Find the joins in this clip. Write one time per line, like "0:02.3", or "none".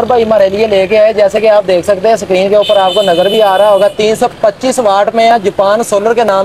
none